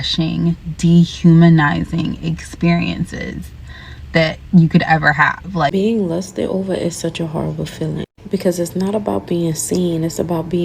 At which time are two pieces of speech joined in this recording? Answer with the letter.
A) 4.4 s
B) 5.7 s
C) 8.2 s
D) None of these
B